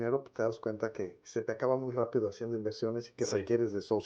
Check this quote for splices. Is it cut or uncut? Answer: uncut